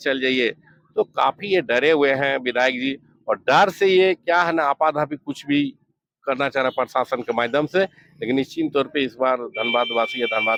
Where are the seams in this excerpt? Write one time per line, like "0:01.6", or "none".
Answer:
none